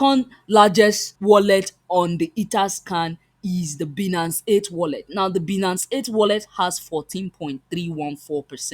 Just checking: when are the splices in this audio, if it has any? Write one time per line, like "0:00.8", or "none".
0:01.1